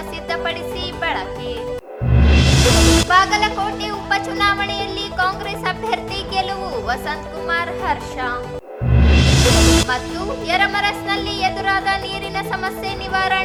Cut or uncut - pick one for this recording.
uncut